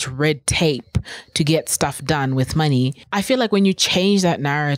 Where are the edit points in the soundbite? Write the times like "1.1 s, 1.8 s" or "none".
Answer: 3.0 s